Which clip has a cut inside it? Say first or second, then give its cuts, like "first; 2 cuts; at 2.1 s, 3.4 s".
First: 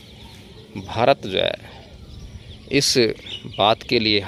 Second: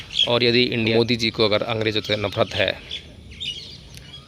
second; 1 cut; at 0.9 s